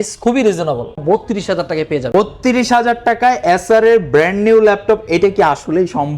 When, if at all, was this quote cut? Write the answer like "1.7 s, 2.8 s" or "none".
1.0 s, 2.1 s